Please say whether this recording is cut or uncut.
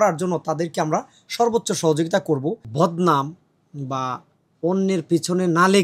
cut